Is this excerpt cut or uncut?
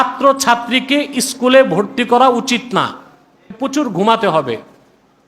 cut